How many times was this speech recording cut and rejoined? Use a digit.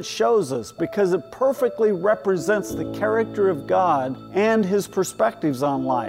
1